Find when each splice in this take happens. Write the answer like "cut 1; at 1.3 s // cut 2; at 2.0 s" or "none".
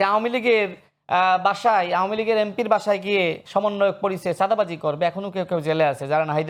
none